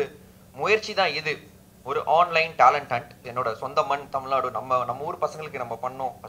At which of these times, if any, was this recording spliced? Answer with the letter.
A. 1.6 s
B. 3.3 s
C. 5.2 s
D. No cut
B